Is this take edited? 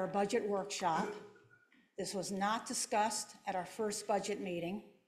no; 0 cuts

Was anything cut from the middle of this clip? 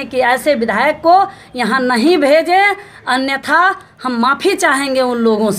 no; 0 cuts

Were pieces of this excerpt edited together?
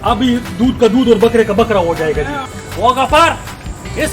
yes; 1 cut; at 2.4 s

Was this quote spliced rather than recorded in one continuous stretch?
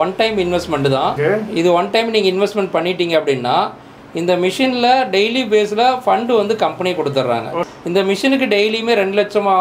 yes; 2 cuts; at 1.2 s, 7.7 s

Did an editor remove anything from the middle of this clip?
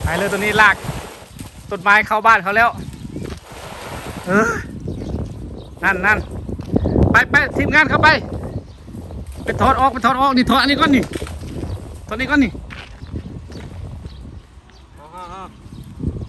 no; 0 cuts

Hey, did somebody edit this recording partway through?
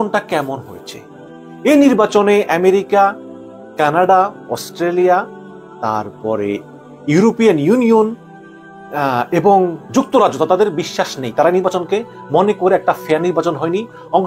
no; 0 cuts

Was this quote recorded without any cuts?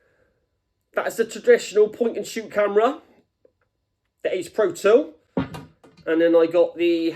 yes; 0 cuts

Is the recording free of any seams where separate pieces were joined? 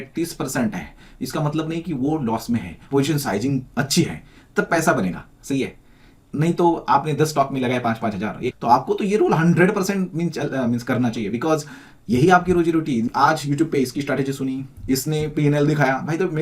no; 3 cuts; at 2.8 s, 8.6 s, 13.1 s

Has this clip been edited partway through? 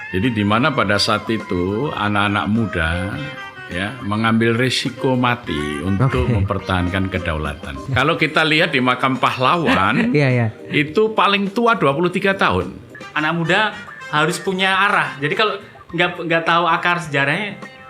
yes; 2 cuts; at 7.8 s, 12.8 s

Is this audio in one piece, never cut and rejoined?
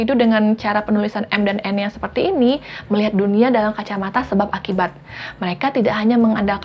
yes; 0 cuts

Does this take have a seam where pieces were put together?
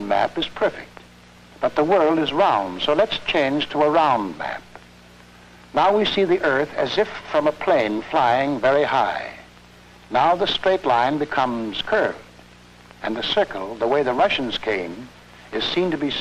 no; 0 cuts

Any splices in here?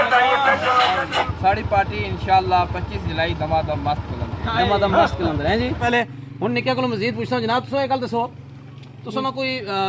yes; 2 cuts; at 1.3 s, 5.8 s

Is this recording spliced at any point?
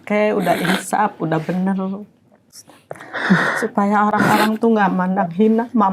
no; 0 cuts

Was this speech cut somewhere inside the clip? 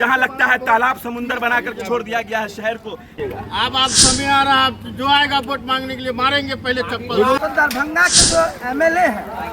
yes; 2 cuts; at 3.1 s, 7.4 s

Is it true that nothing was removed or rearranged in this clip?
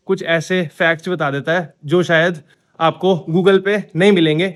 yes; 0 cuts

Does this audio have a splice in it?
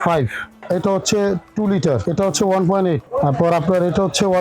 yes; 2 cuts; at 2.0 s, 3.1 s

